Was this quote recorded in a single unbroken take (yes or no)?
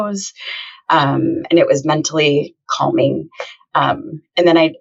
yes